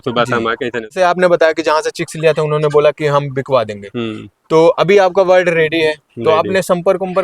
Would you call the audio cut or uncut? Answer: cut